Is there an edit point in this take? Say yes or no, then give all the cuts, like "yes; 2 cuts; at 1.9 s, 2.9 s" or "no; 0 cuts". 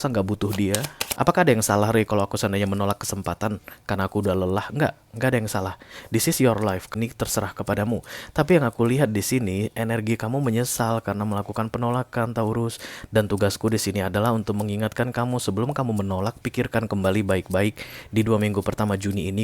yes; 2 cuts; at 1.0 s, 6.9 s